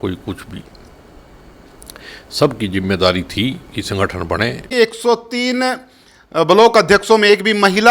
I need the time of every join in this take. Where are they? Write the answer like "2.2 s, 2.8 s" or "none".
4.7 s

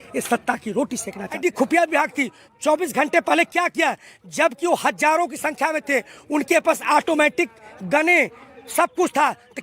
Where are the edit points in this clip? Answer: 1.4 s

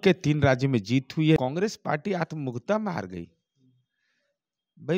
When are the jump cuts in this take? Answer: 1.4 s

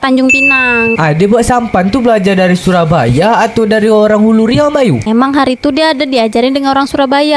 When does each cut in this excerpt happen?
0.9 s

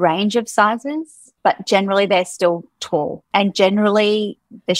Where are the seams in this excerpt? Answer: 3.2 s

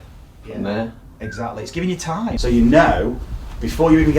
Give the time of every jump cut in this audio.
2.4 s

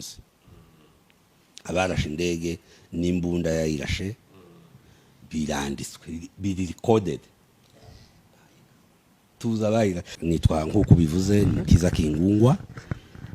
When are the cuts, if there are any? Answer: 10.1 s

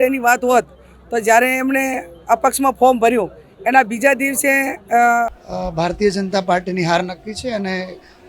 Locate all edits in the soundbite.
5.5 s

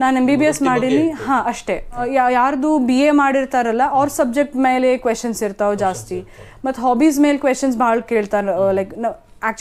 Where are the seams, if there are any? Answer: 2.0 s

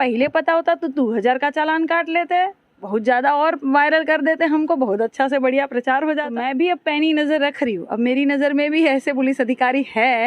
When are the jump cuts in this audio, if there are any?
6.4 s

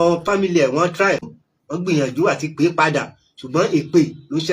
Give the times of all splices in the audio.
1.2 s

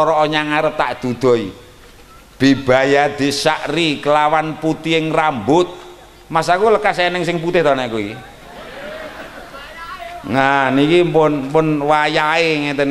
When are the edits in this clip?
none

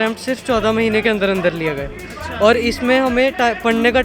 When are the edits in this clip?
none

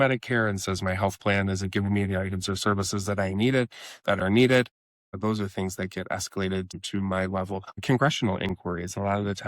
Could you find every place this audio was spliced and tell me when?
6.8 s, 7.7 s

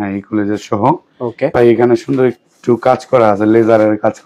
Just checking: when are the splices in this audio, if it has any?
1.5 s

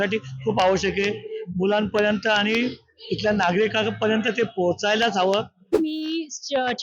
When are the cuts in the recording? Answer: 5.7 s

